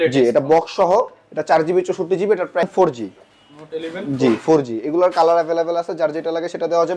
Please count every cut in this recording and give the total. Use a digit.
1